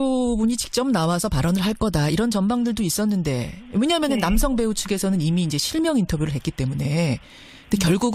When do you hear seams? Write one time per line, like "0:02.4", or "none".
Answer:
none